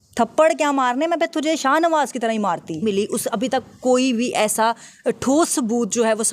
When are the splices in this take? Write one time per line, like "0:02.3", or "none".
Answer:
0:02.8